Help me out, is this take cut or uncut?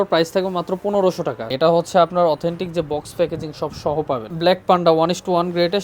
cut